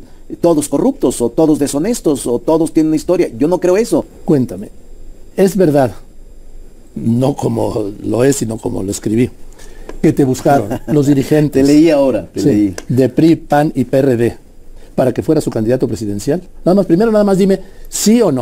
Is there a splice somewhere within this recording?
yes; 1 cut; at 4.1 s

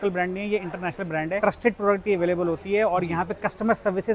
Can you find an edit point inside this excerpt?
yes; 1 cut; at 1.4 s

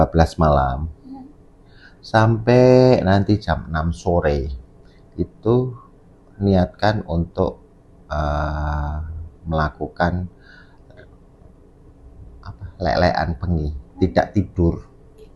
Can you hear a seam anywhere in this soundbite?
no; 0 cuts

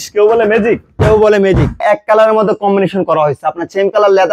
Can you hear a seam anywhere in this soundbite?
yes; 1 cut; at 1.8 s

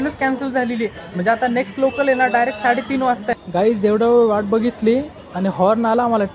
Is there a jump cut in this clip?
yes; 1 cut; at 3.4 s

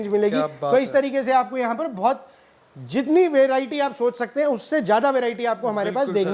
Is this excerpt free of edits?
yes; 0 cuts

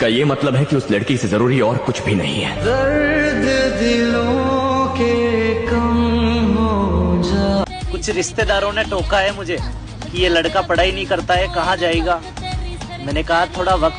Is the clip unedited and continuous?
no; 1 cut; at 7.8 s

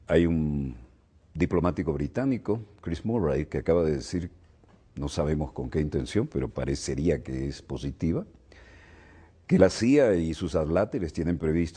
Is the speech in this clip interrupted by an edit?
yes; 1 cut; at 10.5 s

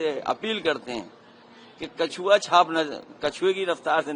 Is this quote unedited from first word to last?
yes; 0 cuts

